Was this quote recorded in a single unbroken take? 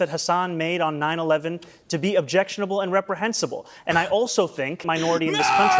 no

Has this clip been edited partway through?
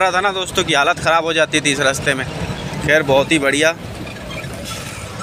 no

